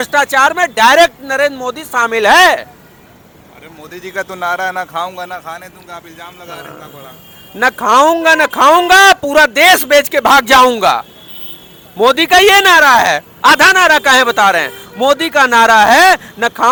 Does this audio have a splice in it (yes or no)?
no